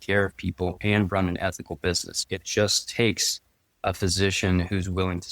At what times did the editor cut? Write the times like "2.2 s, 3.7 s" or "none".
2.1 s